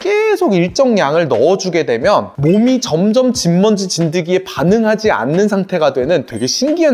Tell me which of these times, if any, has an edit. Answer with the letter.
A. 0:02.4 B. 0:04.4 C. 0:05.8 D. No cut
D